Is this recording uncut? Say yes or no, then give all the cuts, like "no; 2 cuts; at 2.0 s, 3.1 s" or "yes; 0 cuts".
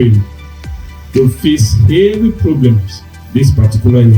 no; 1 cut; at 3.1 s